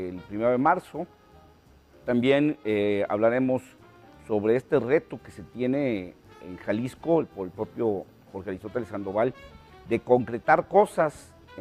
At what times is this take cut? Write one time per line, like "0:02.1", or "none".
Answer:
0:10.2